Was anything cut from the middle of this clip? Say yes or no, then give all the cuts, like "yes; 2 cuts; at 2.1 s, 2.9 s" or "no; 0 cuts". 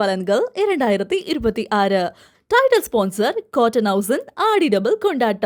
no; 0 cuts